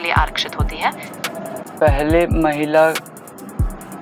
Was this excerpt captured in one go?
no; 1 cut; at 1.1 s

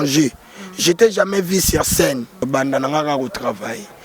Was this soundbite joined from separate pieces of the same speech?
yes; 1 cut; at 2.5 s

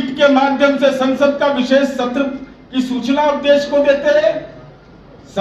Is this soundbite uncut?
yes; 0 cuts

